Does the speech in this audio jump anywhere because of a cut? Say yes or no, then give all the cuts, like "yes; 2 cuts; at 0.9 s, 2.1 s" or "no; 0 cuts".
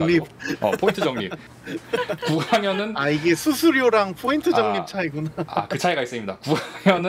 yes; 1 cut; at 1.4 s